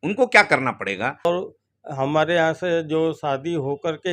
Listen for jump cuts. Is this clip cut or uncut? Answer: cut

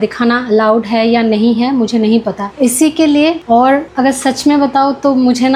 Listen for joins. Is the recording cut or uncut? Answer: uncut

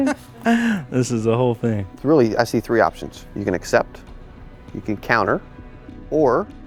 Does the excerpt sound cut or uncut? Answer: uncut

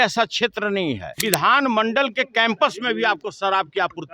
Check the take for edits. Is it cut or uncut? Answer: cut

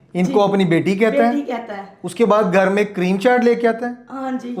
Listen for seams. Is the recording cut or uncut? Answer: uncut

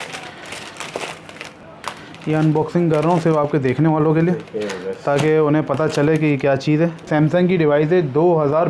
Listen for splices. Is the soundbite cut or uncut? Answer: cut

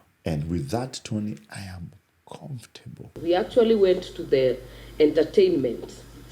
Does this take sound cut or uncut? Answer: cut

